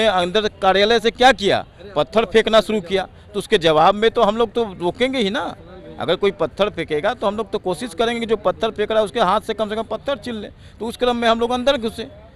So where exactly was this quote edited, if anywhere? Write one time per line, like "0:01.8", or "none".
none